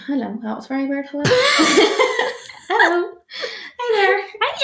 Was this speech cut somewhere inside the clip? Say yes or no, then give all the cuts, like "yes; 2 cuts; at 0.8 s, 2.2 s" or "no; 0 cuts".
no; 0 cuts